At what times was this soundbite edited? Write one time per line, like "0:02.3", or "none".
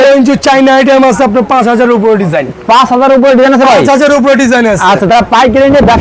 none